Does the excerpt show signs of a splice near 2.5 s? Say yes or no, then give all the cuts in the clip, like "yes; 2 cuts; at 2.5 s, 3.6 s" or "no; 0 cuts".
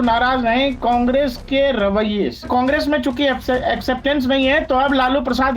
yes; 1 cut; at 2.5 s